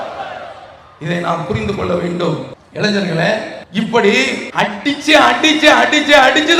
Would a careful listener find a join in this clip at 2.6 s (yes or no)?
yes